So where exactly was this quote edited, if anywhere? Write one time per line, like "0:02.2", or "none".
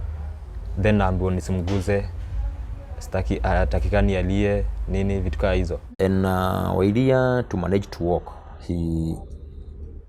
none